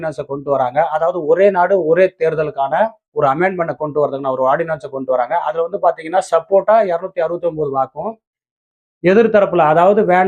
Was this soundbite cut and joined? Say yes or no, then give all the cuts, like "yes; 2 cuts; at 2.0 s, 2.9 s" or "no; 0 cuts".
no; 0 cuts